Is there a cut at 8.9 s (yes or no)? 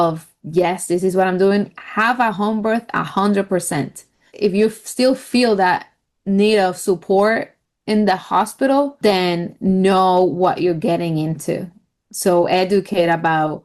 yes